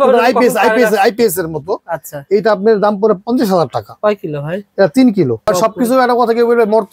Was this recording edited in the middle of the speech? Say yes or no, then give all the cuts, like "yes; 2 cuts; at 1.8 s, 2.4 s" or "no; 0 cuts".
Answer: yes; 1 cut; at 5.5 s